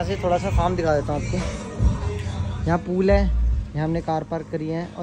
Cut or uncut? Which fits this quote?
uncut